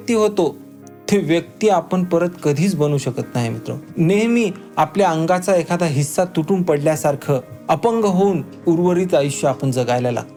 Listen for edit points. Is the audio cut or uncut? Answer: uncut